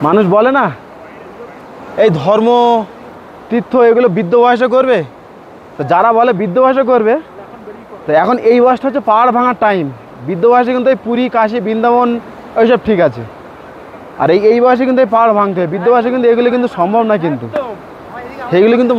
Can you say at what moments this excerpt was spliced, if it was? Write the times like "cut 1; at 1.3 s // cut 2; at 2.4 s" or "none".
none